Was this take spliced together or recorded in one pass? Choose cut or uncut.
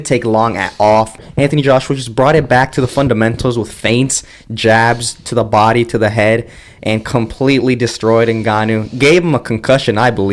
cut